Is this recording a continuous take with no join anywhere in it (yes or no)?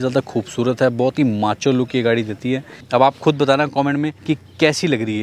no